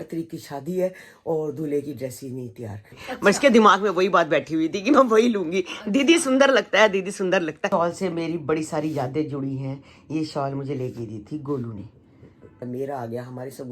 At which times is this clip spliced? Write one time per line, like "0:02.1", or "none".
0:03.0
0:07.6
0:12.6